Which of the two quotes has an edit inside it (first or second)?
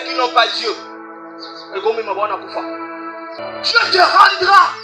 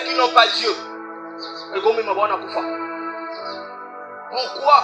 first